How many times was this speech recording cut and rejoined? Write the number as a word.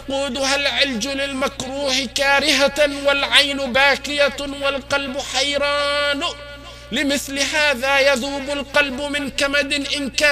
zero